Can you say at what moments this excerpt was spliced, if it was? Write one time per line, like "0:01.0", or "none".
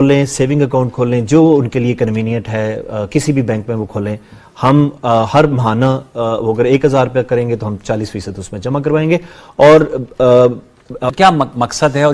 0:11.1